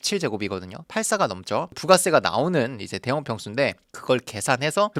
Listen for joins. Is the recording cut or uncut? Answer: uncut